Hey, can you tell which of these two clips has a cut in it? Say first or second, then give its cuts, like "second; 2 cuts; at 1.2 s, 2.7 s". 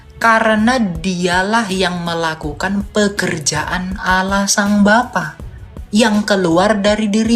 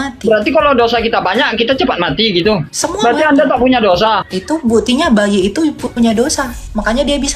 second; 2 cuts; at 2.7 s, 4.3 s